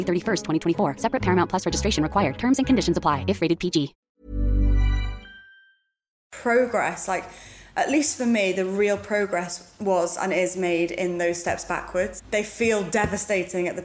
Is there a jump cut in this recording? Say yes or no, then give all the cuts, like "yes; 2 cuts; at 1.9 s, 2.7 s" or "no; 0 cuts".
yes; 2 cuts; at 6.2 s, 12.2 s